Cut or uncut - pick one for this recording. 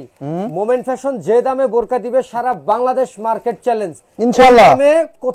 uncut